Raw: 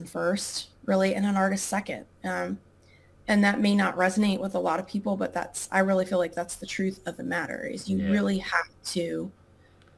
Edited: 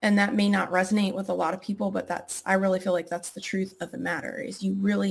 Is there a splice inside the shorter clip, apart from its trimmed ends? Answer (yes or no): no